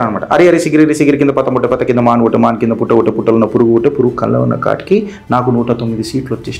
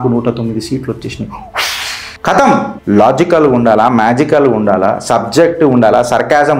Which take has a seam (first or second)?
second